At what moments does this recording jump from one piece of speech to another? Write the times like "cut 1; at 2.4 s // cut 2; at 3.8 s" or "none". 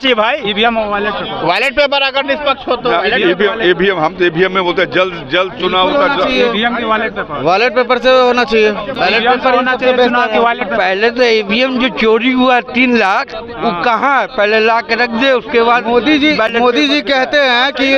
none